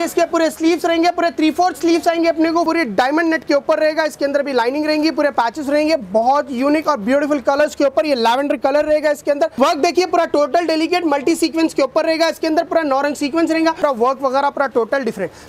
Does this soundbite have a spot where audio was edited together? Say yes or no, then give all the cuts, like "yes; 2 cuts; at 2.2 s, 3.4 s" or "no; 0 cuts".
yes; 3 cuts; at 2.7 s, 9.5 s, 13.8 s